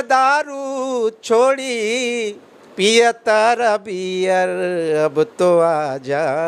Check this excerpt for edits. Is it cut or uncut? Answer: uncut